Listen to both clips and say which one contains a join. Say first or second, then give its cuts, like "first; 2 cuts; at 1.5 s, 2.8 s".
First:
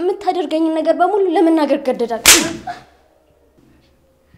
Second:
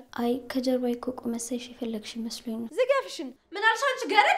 second; 2 cuts; at 2.7 s, 3.4 s